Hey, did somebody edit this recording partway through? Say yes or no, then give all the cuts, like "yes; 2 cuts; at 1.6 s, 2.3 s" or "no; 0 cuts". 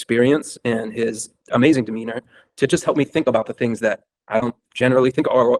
no; 0 cuts